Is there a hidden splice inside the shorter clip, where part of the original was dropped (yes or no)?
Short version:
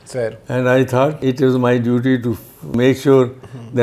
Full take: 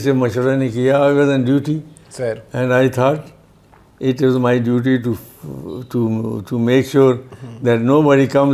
yes